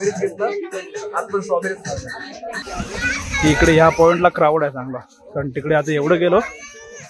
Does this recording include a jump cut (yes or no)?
yes